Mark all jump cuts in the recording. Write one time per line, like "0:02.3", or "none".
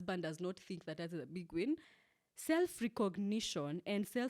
0:02.0